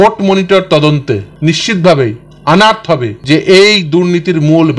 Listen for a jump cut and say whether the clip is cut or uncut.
cut